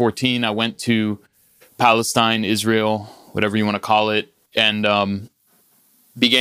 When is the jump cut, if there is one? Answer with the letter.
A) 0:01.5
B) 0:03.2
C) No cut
C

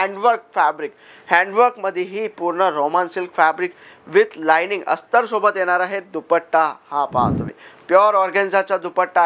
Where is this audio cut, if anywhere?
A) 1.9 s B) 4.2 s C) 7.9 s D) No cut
D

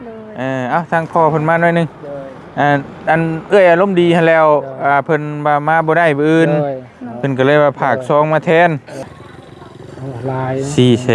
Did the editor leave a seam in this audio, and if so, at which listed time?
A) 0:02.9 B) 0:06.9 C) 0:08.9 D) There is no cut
C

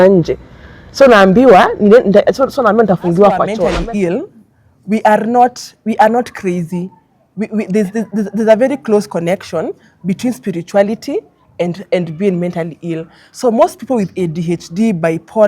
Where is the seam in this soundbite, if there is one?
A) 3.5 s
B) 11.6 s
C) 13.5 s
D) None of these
A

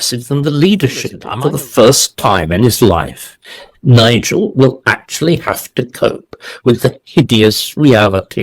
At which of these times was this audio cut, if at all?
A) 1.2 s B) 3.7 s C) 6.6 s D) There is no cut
A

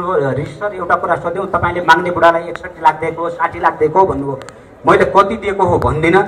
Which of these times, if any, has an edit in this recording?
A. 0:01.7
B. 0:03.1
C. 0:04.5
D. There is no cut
D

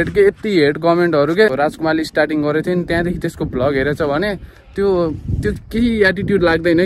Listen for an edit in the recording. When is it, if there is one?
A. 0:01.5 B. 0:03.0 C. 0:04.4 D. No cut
A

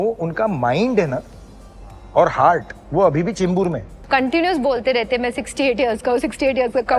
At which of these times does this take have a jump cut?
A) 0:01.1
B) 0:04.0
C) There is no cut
B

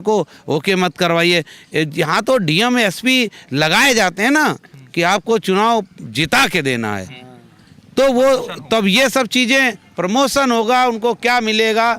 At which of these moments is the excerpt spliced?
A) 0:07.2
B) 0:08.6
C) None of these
C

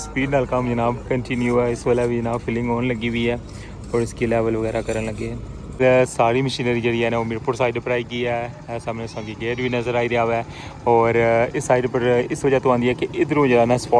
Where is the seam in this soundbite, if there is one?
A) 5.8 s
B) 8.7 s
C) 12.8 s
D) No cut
A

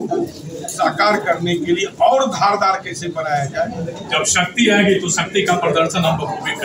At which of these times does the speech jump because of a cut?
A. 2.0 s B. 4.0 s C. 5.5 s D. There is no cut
B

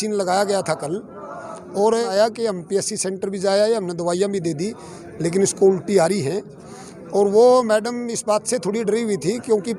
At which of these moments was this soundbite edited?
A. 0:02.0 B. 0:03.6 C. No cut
A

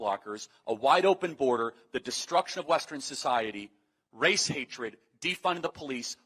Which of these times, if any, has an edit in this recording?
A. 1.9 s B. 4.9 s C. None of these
C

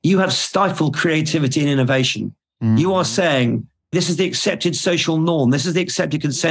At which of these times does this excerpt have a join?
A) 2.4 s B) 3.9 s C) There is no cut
C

